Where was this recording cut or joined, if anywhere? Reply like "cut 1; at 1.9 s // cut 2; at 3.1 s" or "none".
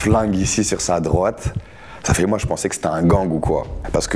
none

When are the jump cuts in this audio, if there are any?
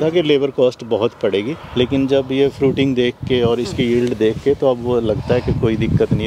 none

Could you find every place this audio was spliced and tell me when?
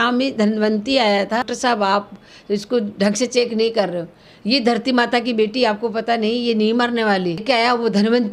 cut 1; at 1.5 s // cut 2; at 7.4 s

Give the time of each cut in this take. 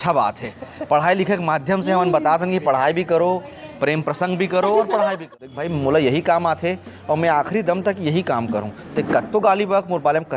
cut 1; at 5.3 s

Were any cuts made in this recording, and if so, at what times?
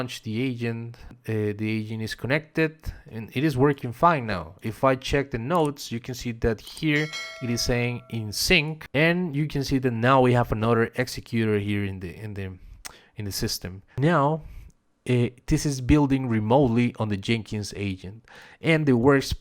cut 1; at 1.1 s // cut 2; at 8.8 s // cut 3; at 13.9 s

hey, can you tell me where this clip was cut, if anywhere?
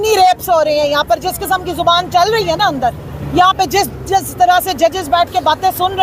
cut 1; at 3.1 s

